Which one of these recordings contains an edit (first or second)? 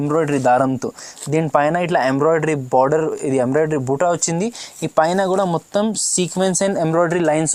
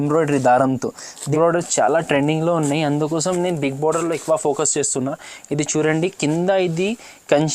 second